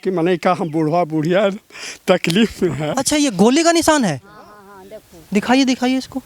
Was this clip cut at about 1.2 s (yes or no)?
no